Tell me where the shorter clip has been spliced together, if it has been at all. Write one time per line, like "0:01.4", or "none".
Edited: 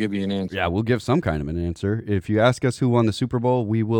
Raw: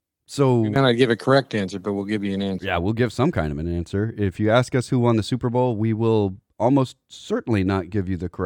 none